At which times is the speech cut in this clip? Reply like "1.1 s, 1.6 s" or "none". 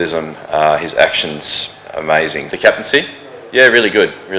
2.5 s

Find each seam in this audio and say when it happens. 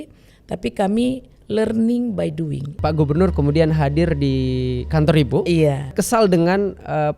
2.7 s, 5.9 s

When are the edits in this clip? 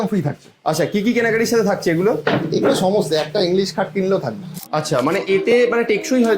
4.6 s

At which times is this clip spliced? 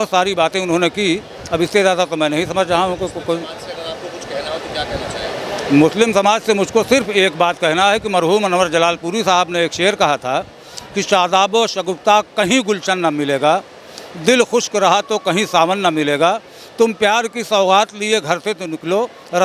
none

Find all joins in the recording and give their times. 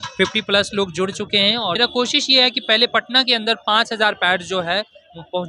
1.8 s

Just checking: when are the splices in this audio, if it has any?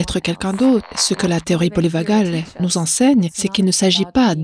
0.9 s, 2.5 s, 3.4 s

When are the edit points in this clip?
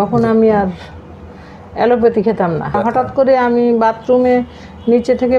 2.8 s

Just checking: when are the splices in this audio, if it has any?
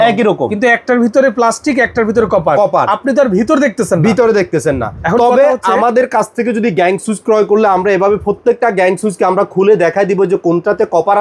none

